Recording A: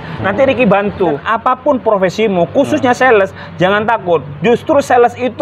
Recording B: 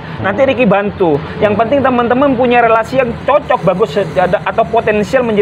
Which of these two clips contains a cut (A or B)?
A